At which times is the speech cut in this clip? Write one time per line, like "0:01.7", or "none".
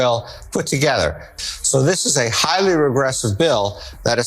0:01.3